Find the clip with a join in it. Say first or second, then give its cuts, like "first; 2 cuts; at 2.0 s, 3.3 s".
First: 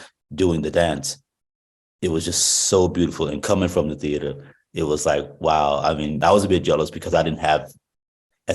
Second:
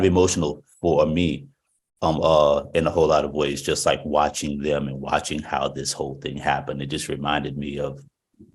first; 1 cut; at 6.2 s